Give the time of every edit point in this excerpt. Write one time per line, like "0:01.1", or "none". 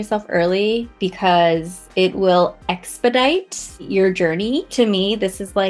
0:00.9
0:01.8
0:03.9
0:04.7